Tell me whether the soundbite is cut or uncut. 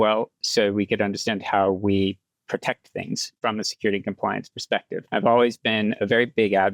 cut